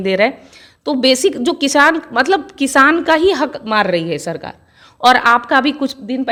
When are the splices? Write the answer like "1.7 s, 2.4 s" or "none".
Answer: none